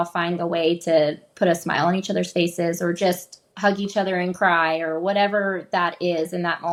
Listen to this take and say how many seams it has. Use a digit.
0